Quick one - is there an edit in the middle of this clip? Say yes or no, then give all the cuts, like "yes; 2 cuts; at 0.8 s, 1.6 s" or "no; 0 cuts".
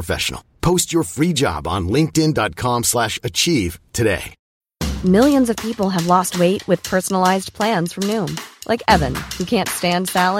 yes; 1 cut; at 4.4 s